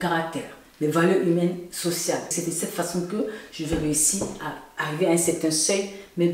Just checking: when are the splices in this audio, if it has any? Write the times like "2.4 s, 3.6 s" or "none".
2.3 s